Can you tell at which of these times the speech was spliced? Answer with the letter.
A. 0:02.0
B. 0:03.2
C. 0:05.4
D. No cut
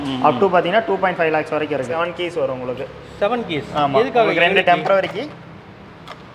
A